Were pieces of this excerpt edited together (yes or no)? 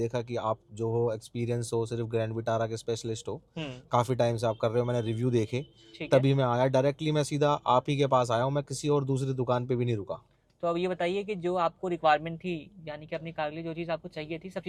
no